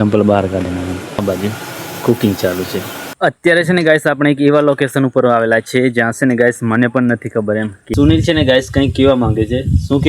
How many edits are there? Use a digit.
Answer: 3